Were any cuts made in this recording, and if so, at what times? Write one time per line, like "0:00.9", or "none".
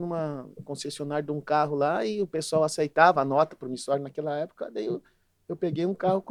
none